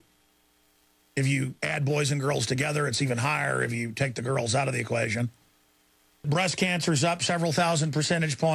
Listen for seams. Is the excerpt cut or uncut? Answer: cut